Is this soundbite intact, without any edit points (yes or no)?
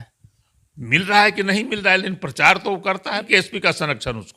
no